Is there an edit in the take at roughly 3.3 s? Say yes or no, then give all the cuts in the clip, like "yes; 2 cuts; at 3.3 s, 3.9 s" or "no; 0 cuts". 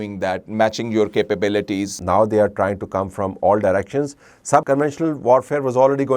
no; 2 cuts; at 1.9 s, 4.6 s